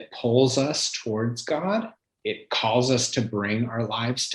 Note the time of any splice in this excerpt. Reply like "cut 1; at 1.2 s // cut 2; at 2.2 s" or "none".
cut 1; at 2.1 s